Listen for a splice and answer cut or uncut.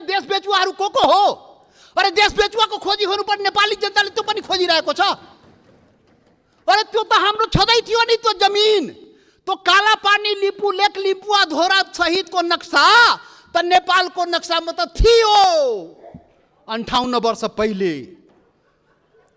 uncut